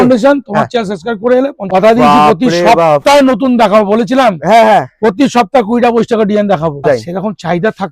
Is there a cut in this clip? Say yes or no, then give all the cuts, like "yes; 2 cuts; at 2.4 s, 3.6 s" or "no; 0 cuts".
yes; 2 cuts; at 1.7 s, 6.8 s